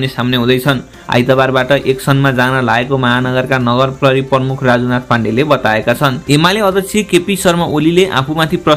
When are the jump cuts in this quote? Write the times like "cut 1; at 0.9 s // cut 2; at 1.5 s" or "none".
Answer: cut 1; at 0.9 s // cut 2; at 6.2 s